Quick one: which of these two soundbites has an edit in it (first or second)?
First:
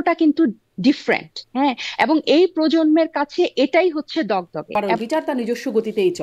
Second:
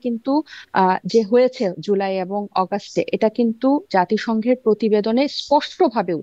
first